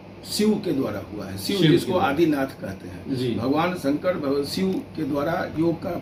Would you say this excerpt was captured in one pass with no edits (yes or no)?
yes